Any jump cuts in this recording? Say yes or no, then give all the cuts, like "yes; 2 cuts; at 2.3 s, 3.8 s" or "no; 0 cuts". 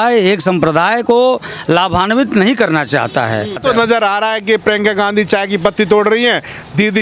no; 0 cuts